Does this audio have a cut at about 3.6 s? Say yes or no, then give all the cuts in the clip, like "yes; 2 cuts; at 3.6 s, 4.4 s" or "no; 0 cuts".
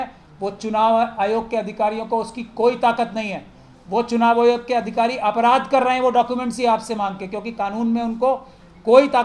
no; 0 cuts